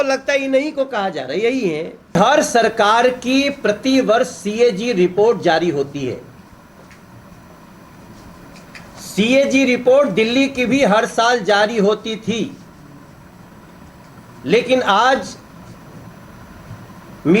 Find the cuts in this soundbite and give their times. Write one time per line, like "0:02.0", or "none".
0:02.1